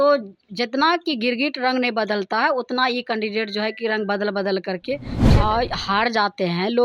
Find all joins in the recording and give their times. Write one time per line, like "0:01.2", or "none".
0:05.2